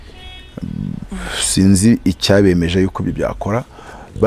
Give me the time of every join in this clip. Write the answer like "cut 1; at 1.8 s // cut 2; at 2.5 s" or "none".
none